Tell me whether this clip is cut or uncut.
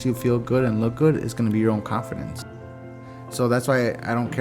cut